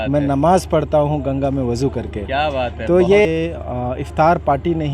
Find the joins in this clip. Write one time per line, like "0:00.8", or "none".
0:03.3